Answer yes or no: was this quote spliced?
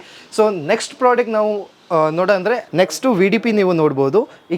yes